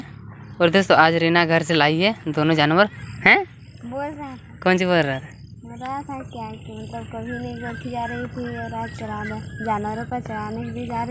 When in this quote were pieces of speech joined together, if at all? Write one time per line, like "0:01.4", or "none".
0:03.0